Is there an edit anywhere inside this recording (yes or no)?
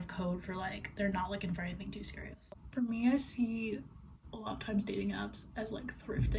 yes